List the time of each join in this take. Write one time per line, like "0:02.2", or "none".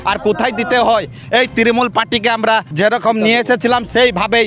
0:02.7